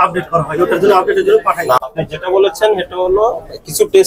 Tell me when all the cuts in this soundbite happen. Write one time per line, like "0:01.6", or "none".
0:01.8